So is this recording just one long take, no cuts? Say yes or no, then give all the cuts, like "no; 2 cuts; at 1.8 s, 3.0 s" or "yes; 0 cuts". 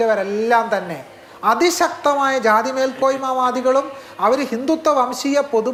yes; 0 cuts